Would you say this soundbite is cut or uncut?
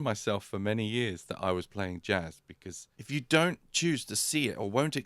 cut